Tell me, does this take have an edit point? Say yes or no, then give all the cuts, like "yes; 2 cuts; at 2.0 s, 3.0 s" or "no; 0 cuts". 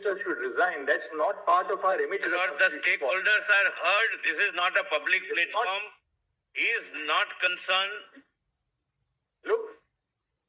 no; 0 cuts